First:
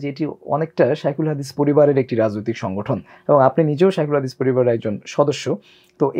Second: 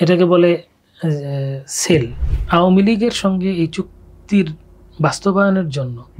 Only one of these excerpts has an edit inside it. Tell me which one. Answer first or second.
second